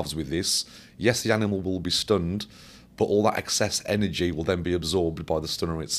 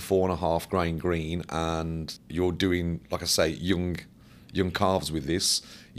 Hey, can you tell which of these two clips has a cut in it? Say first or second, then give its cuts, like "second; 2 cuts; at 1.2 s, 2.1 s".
second; 1 cut; at 2.2 s